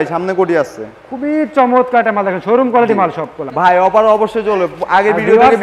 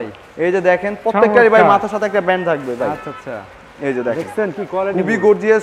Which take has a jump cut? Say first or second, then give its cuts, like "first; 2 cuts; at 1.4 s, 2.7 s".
first; 1 cut; at 3.4 s